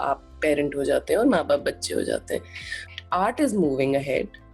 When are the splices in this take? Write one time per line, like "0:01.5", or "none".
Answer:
0:02.9